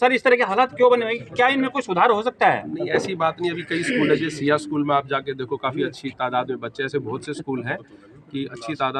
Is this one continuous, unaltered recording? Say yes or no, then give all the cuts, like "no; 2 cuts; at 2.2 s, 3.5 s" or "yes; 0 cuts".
yes; 0 cuts